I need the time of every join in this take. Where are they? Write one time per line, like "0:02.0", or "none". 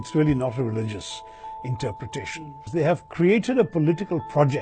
0:02.6